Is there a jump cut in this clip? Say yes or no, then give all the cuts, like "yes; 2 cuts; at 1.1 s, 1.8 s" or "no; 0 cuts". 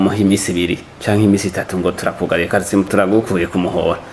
yes; 1 cut; at 2.7 s